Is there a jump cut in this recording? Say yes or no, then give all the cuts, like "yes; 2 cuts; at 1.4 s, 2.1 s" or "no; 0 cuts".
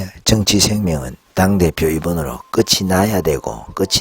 yes; 1 cut; at 1.2 s